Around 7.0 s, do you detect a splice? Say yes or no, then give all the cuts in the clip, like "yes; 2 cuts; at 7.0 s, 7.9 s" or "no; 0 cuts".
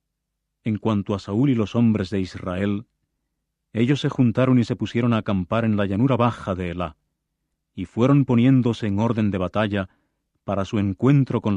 no; 1 cut; at 1.6 s